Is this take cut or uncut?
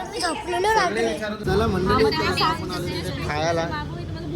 cut